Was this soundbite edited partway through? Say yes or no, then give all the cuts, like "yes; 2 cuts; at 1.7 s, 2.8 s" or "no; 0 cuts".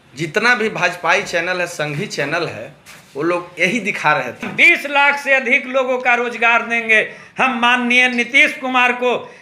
yes; 1 cut; at 4.5 s